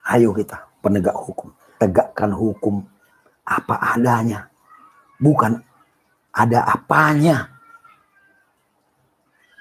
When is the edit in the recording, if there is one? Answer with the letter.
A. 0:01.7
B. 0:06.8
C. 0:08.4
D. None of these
A